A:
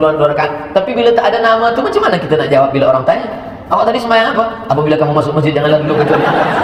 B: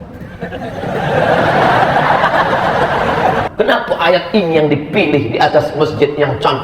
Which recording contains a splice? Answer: B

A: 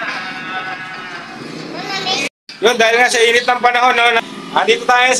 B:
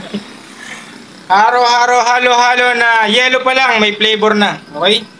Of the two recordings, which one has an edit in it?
A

